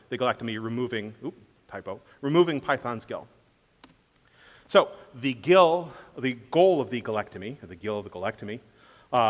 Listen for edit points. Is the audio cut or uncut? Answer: uncut